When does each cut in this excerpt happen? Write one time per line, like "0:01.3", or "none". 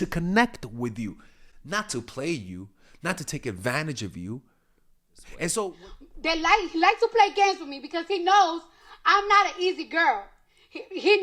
0:05.8